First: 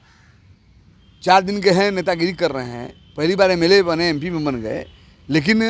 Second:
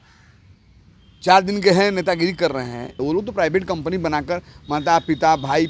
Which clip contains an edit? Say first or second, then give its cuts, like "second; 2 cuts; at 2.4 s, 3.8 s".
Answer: second; 1 cut; at 2.9 s